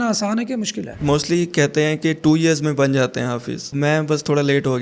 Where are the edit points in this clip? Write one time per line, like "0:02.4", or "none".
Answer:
0:01.0
0:03.7